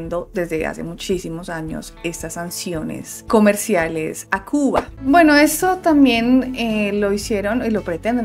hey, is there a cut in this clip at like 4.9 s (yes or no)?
yes